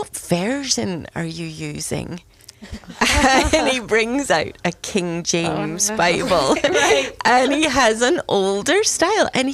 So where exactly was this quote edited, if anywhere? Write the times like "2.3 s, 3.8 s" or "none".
none